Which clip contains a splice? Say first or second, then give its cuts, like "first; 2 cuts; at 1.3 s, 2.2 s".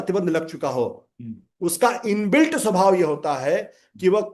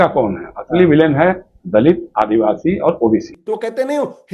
second; 1 cut; at 3.3 s